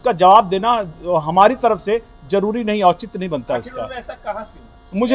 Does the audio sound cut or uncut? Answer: uncut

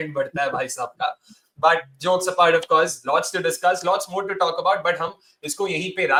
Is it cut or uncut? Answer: uncut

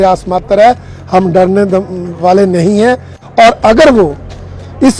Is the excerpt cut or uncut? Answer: cut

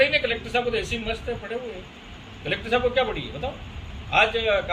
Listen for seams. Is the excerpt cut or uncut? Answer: uncut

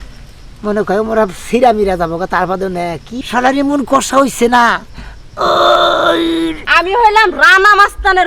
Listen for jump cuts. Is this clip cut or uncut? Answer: cut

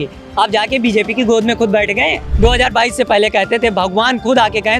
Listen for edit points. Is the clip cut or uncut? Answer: cut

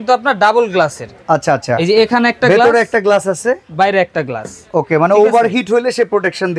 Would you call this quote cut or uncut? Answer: uncut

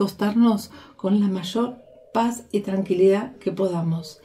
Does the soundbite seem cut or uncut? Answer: uncut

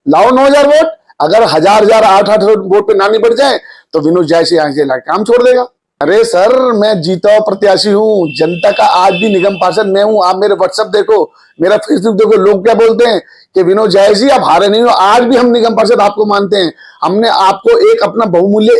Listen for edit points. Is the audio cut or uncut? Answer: cut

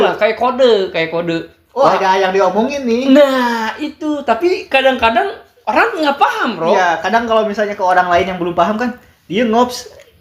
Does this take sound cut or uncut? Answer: uncut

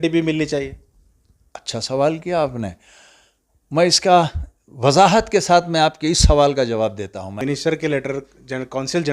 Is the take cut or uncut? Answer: cut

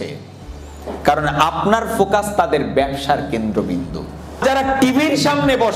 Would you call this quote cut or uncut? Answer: cut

